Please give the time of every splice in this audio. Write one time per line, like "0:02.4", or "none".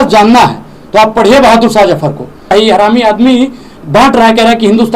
0:02.5